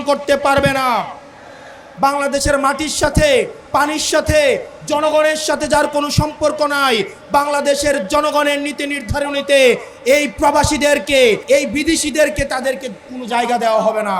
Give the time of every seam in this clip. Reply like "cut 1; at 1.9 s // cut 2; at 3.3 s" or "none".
cut 1; at 1.9 s // cut 2; at 11.4 s